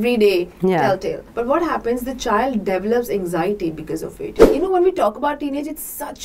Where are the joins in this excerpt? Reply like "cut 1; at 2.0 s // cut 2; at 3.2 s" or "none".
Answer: cut 1; at 1.2 s // cut 2; at 4.5 s